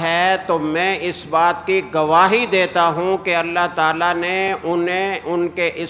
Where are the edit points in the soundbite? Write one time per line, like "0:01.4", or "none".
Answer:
none